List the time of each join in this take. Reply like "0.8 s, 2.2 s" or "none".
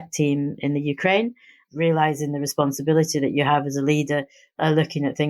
1.6 s, 4.6 s